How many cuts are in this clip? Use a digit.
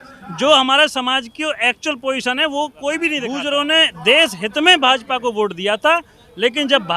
1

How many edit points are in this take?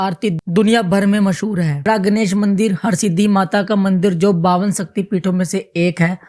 1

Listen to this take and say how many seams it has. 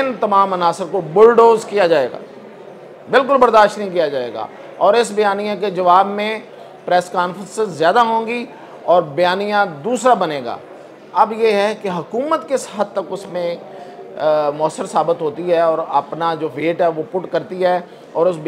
0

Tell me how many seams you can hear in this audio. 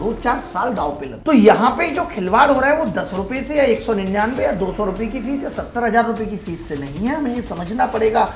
1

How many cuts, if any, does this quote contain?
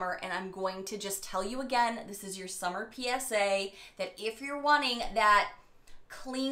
0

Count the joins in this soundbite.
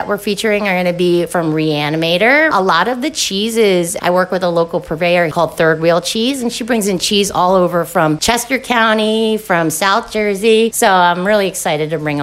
3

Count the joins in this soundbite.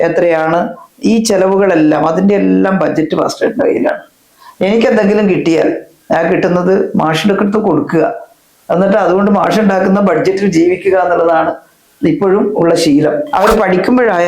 1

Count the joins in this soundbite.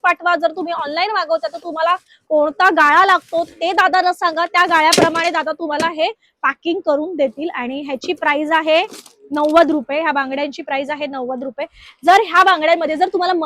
0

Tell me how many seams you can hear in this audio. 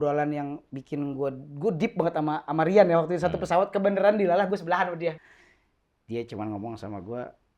1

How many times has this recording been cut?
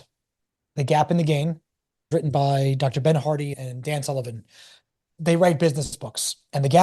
1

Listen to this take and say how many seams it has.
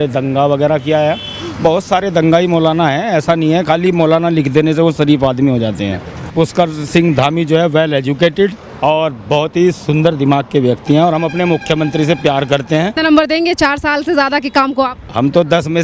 2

